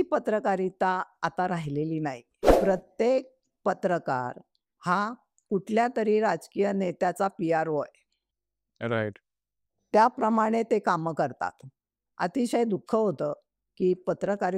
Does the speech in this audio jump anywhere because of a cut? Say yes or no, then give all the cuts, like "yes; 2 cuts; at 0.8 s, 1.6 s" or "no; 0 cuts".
yes; 1 cut; at 2.5 s